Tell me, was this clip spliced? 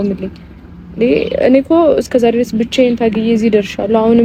no; 0 cuts

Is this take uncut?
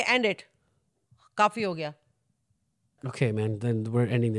yes; 0 cuts

